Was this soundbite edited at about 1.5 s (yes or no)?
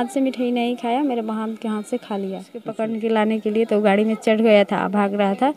no